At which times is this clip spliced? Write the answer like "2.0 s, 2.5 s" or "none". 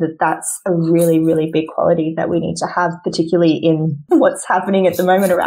4.0 s